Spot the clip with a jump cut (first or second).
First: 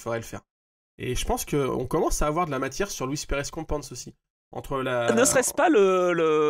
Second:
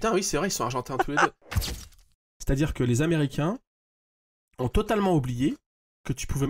second